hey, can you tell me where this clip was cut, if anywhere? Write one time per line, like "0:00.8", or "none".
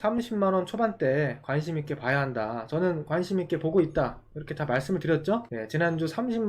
0:05.6